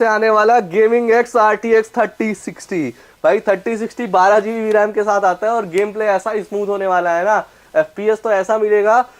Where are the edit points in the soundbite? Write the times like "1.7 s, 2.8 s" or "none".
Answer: none